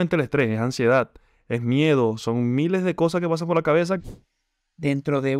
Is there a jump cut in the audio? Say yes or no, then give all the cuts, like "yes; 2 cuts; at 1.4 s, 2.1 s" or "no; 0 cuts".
yes; 1 cut; at 4.0 s